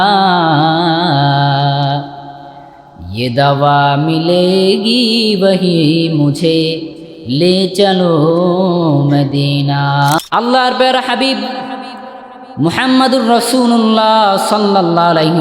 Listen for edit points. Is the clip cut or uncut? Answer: cut